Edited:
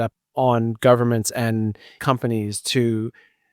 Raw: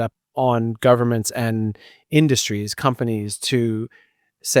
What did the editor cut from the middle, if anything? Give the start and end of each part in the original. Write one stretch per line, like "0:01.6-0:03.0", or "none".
0:01.9-0:02.7